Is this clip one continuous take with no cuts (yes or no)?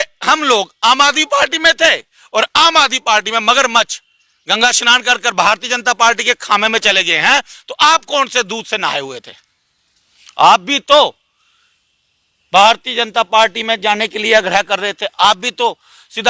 yes